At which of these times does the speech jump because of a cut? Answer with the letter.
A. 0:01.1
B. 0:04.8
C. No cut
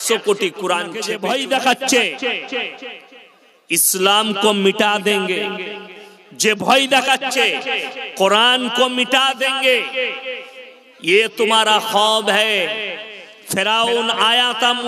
A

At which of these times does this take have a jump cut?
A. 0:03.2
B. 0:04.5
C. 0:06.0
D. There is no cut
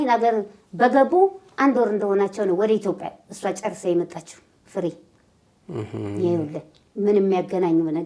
D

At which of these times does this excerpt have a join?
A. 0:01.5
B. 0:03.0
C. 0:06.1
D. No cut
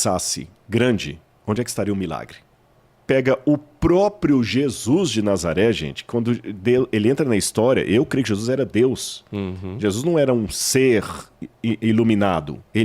B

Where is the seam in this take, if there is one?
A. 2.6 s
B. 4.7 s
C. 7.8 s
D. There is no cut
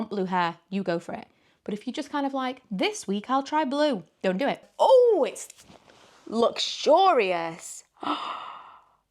B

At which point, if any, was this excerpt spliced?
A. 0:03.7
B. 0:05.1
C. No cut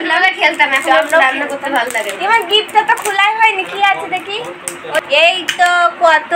B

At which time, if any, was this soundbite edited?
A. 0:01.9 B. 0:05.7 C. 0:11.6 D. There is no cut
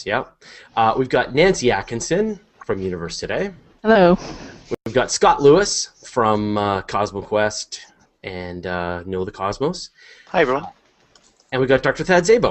B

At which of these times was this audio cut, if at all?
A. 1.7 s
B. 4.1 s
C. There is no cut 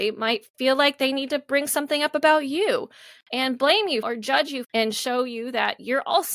B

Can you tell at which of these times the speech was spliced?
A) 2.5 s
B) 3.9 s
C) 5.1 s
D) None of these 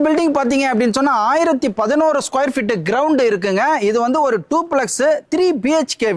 D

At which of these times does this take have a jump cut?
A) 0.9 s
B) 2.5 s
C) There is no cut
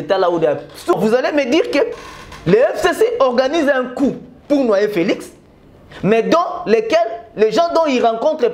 A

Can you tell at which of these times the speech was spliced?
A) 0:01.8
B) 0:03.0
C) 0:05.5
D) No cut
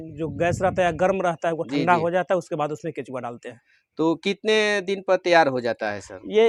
D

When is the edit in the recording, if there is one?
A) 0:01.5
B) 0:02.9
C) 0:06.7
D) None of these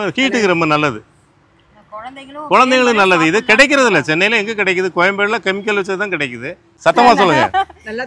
C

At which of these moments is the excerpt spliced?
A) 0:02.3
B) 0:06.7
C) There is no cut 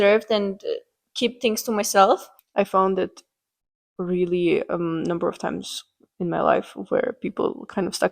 A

